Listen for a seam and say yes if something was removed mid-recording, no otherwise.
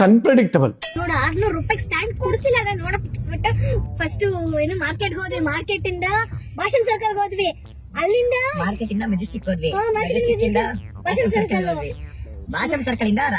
yes